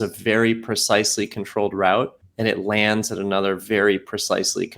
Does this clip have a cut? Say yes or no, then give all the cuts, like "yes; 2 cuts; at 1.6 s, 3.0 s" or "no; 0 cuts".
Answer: yes; 1 cut; at 2.2 s